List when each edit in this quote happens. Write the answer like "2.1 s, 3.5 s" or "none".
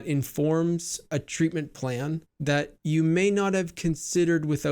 1.1 s, 2.7 s